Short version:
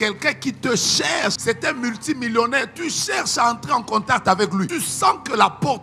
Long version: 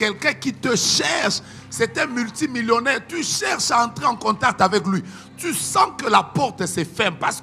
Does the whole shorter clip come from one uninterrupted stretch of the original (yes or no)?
no